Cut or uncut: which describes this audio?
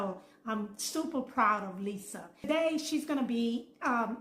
cut